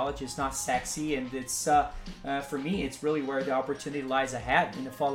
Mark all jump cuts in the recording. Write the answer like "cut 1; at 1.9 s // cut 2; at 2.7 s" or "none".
none